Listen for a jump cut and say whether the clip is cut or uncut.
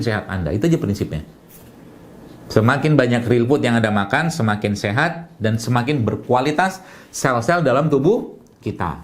uncut